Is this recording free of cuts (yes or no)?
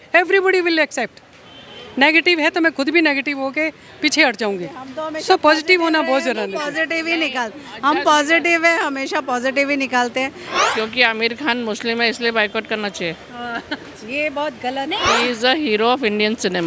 no